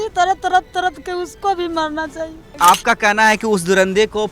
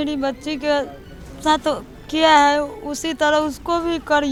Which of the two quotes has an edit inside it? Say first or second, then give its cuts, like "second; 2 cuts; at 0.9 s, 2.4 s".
first; 1 cut; at 2.5 s